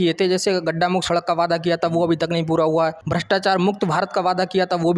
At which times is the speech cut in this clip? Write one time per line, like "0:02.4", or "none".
0:03.0